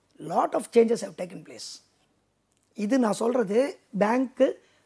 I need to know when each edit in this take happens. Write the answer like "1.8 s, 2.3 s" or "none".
none